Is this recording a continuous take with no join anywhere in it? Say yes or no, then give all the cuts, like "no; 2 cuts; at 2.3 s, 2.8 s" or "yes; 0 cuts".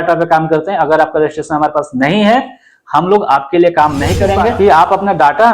no; 1 cut; at 4.5 s